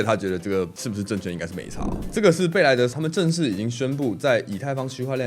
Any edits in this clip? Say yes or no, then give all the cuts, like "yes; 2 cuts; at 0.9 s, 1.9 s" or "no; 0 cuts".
yes; 2 cuts; at 2.1 s, 2.9 s